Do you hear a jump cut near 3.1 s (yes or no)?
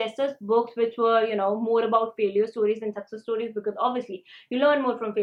no